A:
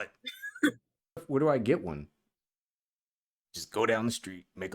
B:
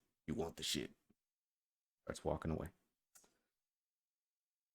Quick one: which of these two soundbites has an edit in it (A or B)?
A